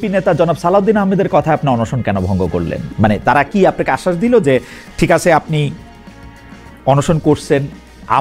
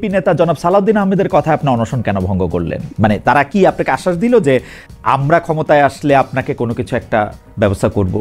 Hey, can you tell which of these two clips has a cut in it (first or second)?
second